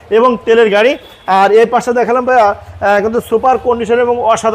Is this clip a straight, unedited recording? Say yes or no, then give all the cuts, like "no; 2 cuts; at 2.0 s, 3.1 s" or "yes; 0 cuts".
yes; 0 cuts